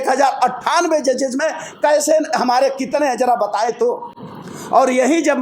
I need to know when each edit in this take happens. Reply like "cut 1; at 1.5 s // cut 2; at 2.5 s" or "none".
none

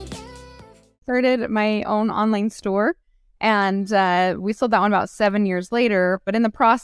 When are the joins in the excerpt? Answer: cut 1; at 1.0 s

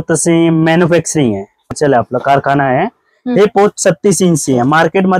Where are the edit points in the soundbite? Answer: cut 1; at 1.7 s

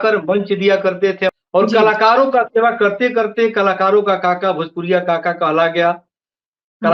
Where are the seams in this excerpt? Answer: cut 1; at 1.3 s

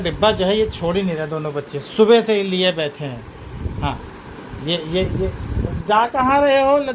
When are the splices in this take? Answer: none

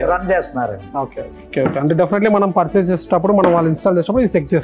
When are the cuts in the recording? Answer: cut 1; at 1.5 s

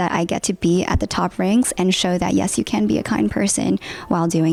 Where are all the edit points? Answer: none

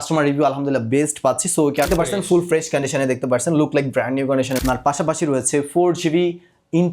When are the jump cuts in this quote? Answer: cut 1; at 1.9 s // cut 2; at 4.6 s

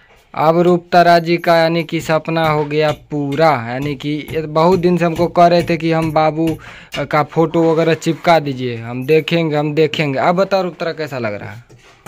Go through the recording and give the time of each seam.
none

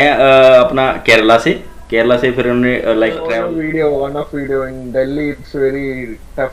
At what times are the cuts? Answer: cut 1; at 3.3 s

